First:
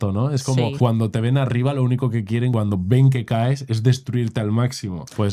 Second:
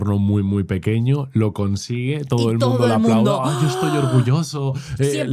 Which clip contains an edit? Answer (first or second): first